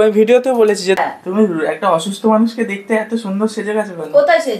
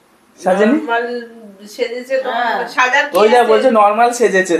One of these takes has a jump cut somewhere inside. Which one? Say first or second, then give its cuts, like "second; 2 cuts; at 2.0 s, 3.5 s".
first; 1 cut; at 1.0 s